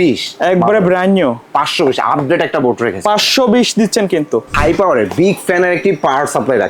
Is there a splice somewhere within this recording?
yes; 1 cut; at 4.5 s

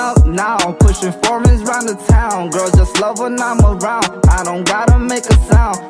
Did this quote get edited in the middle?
no; 0 cuts

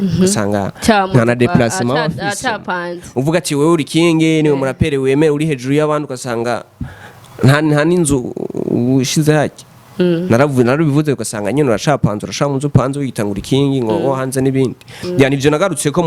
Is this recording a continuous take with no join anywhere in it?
yes; 0 cuts

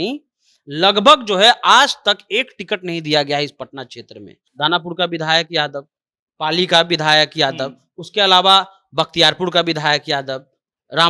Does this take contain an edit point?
yes; 1 cut; at 4.4 s

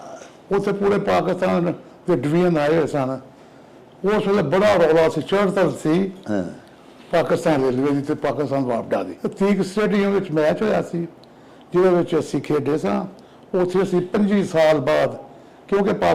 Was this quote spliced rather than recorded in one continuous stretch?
yes; 1 cut; at 9.1 s

